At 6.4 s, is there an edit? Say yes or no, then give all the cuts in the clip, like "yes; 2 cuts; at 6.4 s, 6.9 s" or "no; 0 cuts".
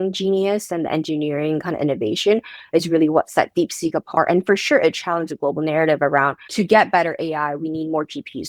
yes; 1 cut; at 6.4 s